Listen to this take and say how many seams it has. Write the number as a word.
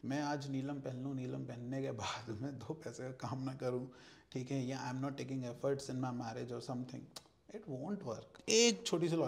one